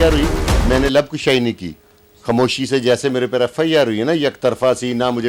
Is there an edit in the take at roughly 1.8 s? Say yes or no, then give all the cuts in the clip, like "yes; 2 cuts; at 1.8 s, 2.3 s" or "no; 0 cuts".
no; 0 cuts